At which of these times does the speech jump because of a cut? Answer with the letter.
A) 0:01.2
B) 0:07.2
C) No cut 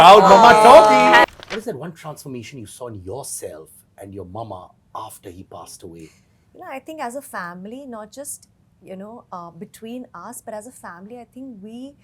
A